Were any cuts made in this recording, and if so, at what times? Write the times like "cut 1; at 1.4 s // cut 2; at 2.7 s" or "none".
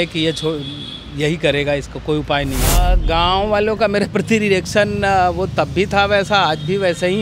cut 1; at 2.8 s